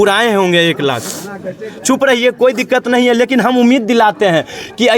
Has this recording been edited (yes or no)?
no